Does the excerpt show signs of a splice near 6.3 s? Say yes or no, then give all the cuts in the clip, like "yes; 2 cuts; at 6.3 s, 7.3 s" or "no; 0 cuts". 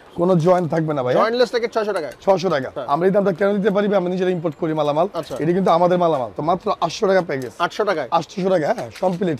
yes; 2 cuts; at 2.8 s, 6.3 s